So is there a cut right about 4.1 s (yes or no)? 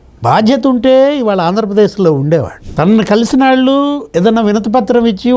no